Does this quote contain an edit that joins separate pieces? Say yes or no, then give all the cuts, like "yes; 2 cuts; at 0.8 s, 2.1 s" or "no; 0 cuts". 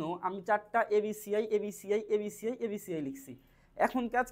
no; 0 cuts